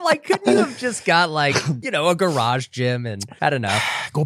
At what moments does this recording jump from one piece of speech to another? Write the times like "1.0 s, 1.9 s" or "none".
1.8 s, 3.2 s